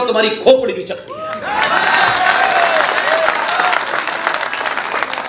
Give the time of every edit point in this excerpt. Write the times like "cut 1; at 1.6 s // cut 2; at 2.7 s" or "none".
none